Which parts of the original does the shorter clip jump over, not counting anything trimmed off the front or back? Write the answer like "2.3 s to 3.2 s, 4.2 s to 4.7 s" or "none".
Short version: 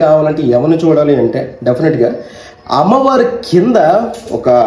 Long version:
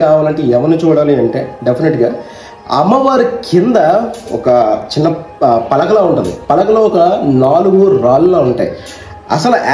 none